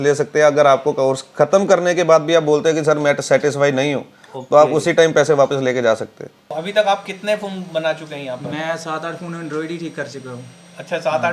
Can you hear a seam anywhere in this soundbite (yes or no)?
yes